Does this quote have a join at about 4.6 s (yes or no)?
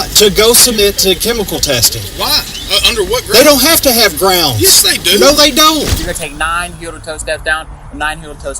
no